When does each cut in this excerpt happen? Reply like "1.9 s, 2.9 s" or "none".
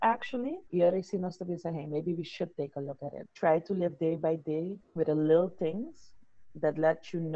3.3 s